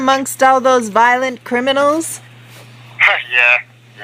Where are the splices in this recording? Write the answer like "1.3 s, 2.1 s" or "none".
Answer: 1.0 s